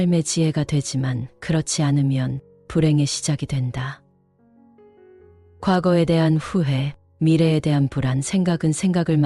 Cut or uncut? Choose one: uncut